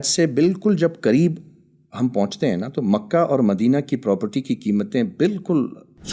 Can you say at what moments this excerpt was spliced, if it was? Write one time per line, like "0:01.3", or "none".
none